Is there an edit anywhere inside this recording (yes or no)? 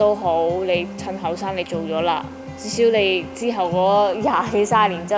no